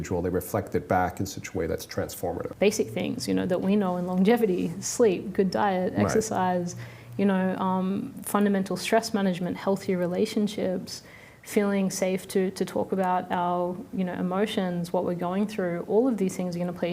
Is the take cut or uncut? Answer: cut